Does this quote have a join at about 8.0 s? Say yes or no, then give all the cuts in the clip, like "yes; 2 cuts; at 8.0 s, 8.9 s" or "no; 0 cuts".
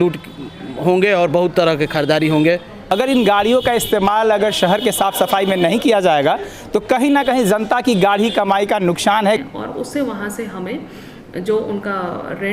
no; 2 cuts; at 2.7 s, 9.3 s